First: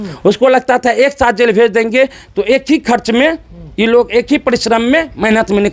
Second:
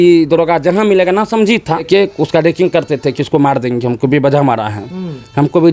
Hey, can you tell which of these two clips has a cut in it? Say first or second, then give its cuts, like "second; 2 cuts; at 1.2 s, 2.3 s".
second; 1 cut; at 1.9 s